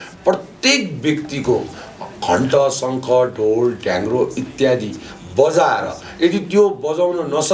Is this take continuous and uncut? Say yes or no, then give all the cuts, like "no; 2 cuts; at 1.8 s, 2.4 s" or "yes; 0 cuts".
yes; 0 cuts